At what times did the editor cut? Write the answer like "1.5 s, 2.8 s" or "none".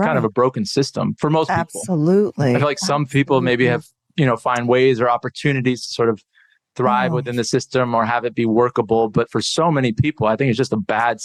none